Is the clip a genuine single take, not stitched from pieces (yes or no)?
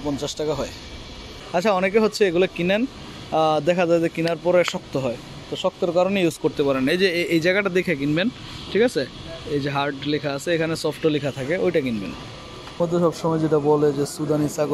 no